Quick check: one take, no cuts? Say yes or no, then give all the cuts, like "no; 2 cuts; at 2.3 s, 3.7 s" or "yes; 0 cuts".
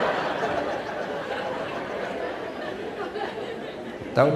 yes; 0 cuts